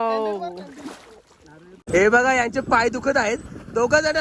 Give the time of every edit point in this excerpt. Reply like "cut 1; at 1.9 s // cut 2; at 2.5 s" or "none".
cut 1; at 1.8 s

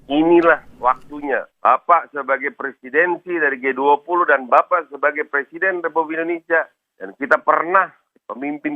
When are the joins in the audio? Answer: cut 1; at 1.5 s

